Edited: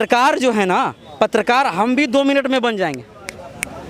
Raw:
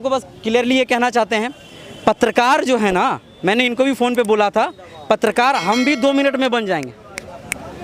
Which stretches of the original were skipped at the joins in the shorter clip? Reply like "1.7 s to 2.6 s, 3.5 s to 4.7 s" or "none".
3.3 s to 4.9 s